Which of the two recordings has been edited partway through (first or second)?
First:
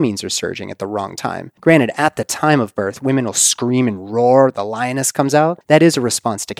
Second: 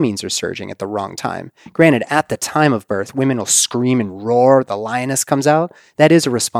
first